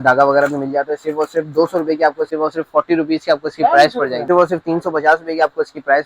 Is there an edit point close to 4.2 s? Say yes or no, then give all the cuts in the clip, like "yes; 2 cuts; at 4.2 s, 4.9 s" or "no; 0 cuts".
yes; 2 cuts; at 2.3 s, 4.2 s